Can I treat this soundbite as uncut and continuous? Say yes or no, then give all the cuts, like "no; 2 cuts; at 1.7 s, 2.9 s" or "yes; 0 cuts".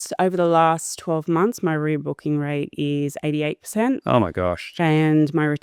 yes; 0 cuts